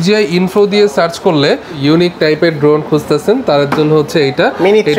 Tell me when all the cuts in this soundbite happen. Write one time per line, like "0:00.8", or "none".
0:01.8